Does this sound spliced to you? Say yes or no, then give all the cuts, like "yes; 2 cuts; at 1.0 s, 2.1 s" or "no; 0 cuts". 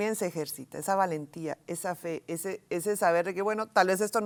no; 0 cuts